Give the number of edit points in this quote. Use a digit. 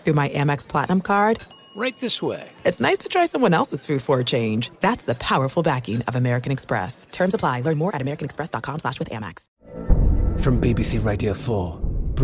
1